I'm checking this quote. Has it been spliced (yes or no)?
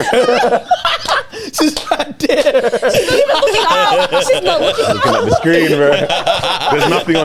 no